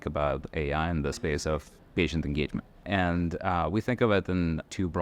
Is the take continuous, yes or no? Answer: no